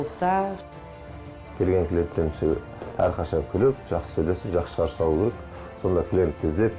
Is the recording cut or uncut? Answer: cut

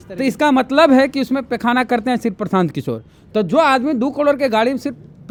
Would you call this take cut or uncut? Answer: uncut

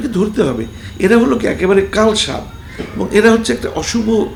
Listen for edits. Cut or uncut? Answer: uncut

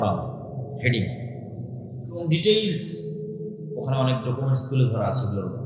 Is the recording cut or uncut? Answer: uncut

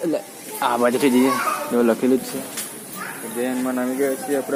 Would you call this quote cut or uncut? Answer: uncut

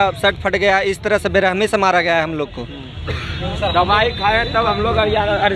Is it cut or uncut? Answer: uncut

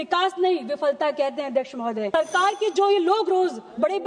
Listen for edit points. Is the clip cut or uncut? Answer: cut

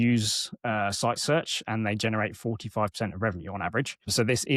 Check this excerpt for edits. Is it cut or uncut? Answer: uncut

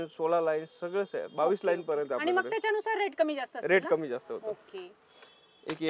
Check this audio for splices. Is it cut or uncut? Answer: uncut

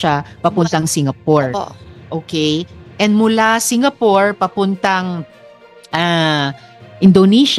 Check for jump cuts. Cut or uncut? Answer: uncut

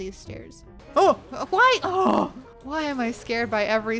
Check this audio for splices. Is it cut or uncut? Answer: uncut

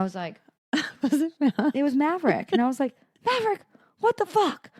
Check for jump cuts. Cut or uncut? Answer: uncut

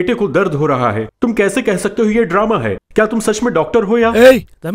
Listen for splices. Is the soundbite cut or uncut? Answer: uncut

